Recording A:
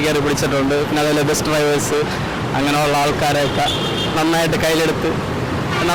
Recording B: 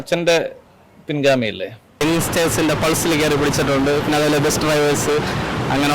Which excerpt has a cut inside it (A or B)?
B